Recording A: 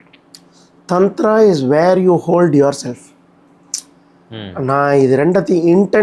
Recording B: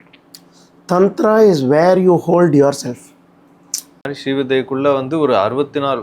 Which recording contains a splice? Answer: B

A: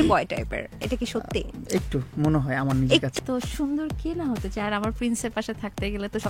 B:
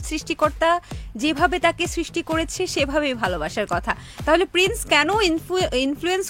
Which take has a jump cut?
A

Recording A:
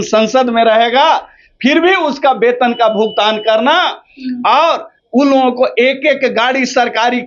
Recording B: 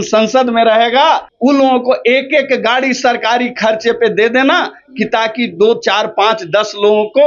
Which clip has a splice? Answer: B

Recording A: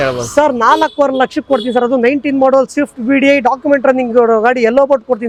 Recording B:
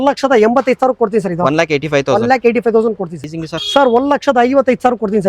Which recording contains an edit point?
B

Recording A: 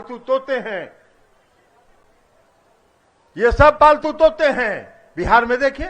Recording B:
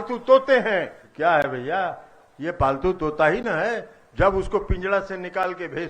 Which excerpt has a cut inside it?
B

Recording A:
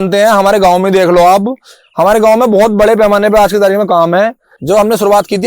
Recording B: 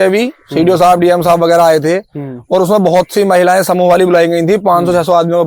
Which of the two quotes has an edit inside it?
A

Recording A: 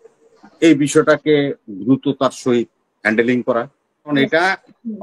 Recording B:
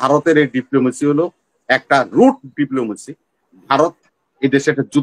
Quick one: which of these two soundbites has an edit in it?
A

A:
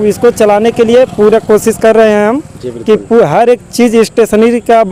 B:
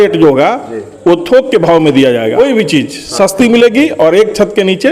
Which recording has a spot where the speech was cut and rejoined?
B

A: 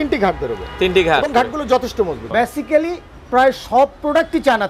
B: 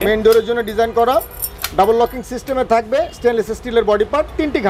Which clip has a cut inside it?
A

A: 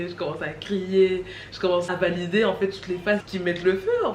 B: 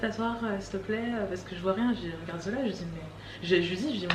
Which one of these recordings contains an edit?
A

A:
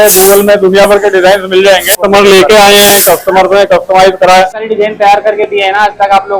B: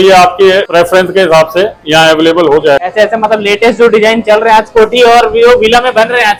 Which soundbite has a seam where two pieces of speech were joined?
A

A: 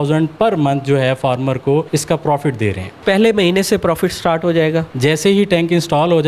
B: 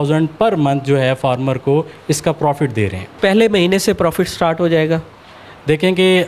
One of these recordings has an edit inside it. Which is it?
A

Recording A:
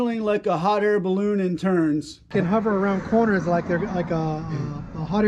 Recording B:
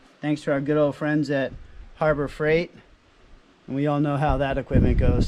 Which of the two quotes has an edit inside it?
A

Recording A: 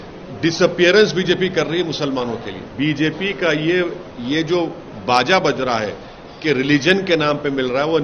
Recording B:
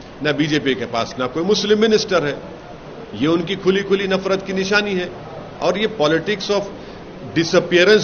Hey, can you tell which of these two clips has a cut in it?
A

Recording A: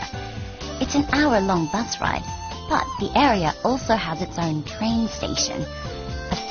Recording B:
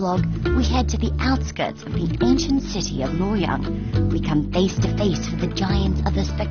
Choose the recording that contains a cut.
A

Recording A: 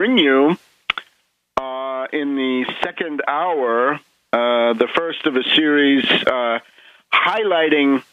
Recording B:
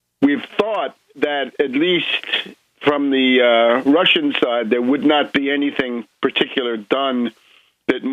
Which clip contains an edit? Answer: B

